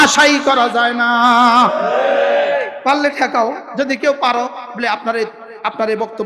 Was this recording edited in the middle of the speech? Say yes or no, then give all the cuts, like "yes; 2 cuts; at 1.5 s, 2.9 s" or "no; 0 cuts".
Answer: yes; 2 cuts; at 2.7 s, 3.6 s